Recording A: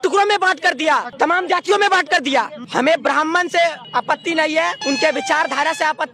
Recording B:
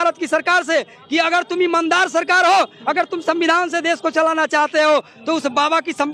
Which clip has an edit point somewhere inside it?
A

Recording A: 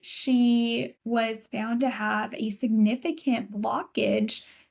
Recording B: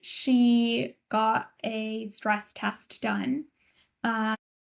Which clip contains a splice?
A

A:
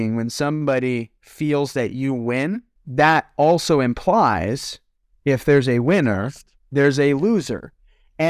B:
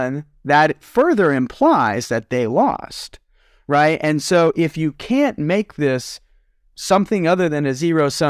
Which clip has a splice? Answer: A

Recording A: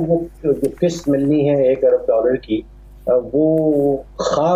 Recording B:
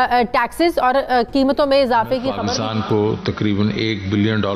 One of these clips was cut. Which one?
B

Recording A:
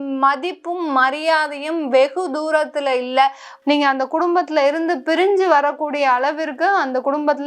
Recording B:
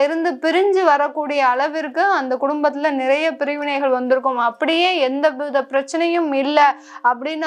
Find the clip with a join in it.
A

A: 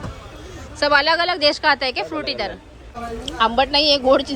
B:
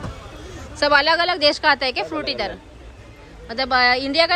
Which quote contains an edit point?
A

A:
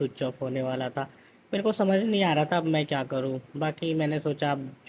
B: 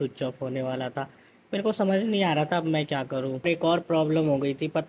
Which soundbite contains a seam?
B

